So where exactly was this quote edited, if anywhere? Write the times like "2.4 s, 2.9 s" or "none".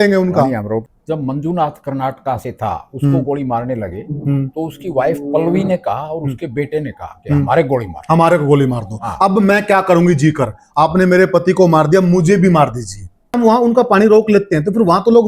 0.9 s, 13.4 s